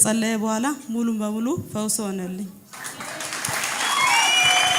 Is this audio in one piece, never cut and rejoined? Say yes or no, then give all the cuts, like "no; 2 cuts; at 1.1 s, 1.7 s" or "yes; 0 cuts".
yes; 0 cuts